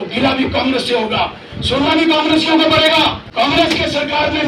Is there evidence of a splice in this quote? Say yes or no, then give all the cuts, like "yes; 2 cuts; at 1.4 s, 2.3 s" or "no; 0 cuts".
yes; 1 cut; at 3.2 s